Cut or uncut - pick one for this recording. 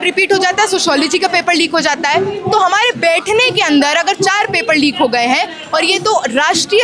uncut